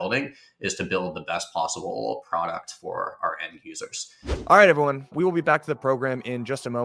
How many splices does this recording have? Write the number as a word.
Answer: one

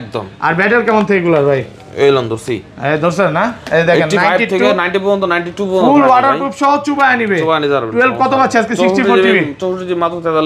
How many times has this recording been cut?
zero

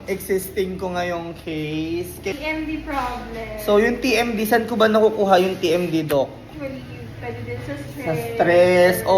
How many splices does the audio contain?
two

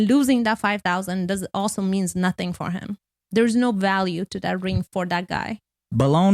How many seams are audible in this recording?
zero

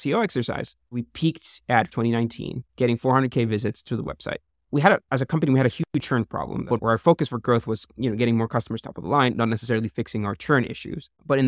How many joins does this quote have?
three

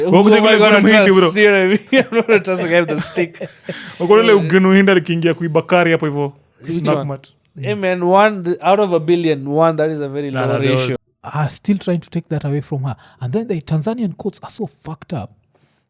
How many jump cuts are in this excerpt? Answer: one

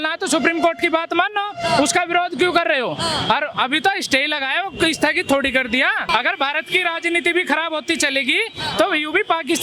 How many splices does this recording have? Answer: one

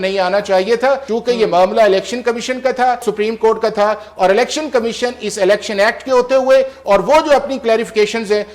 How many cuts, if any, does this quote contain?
two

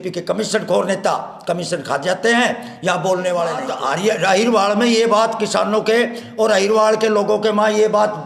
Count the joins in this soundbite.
one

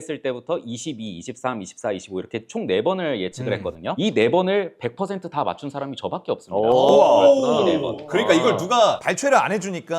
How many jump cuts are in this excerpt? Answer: zero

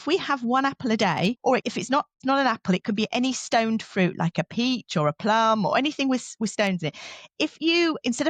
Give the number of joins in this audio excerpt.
zero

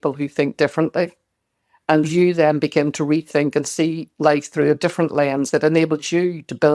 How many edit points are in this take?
one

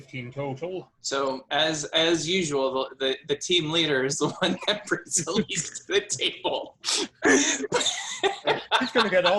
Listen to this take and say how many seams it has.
one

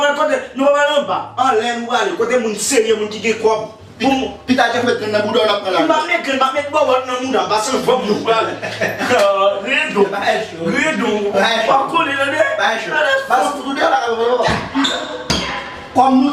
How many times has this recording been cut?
zero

